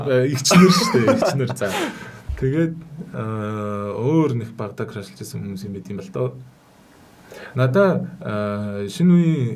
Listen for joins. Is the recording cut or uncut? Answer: uncut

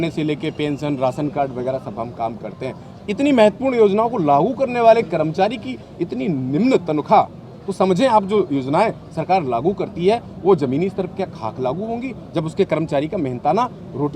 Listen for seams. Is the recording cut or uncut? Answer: uncut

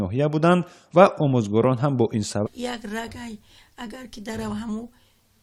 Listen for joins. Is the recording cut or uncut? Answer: uncut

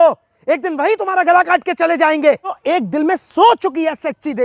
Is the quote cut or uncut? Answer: cut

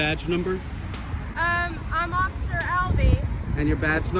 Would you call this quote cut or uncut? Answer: uncut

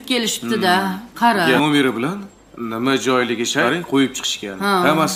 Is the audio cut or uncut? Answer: uncut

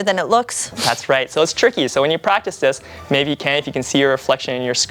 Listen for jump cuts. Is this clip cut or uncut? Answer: uncut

